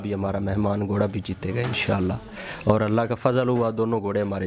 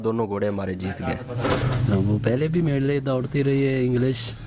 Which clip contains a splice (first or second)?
second